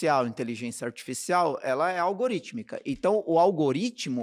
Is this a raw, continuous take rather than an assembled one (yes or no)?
yes